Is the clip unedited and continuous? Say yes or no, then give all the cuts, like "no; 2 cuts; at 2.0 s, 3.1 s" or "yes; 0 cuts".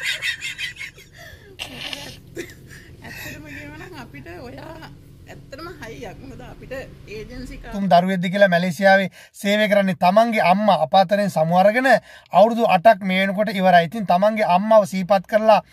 no; 1 cut; at 7.7 s